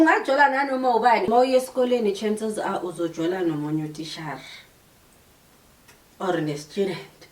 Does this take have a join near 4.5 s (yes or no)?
no